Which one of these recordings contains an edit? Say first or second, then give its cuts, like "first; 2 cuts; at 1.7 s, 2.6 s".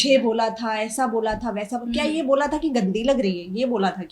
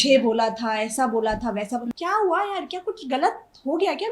second; 1 cut; at 1.9 s